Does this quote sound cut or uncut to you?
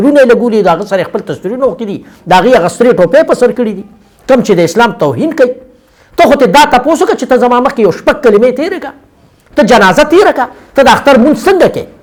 uncut